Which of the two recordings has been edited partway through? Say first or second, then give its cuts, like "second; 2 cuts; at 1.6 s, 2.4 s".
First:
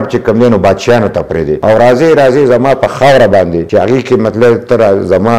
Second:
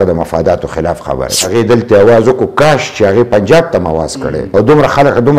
second; 2 cuts; at 1.4 s, 4.4 s